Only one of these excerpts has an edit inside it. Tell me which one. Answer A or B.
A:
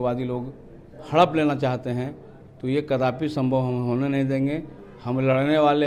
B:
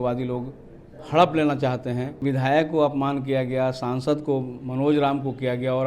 B